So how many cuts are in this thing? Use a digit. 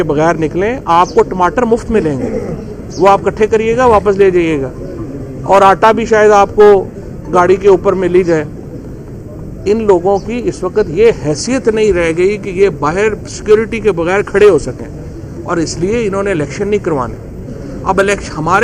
0